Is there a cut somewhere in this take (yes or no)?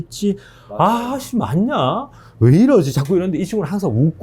no